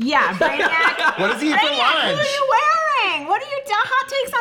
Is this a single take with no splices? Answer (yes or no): yes